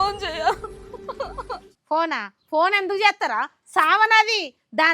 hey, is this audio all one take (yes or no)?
no